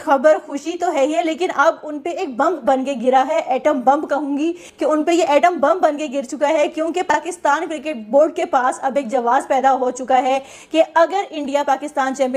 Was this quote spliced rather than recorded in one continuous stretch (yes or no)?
no